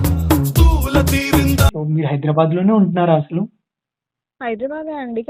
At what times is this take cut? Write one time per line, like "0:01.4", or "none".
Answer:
0:01.7